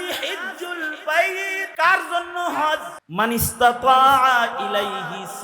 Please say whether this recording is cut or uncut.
cut